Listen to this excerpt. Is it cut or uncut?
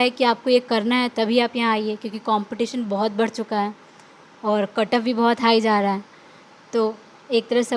uncut